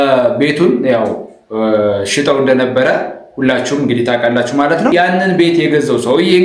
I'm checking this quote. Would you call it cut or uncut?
cut